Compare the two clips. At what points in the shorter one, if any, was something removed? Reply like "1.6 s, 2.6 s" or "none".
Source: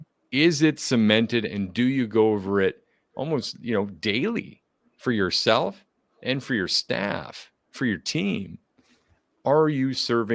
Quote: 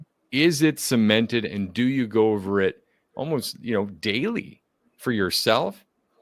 none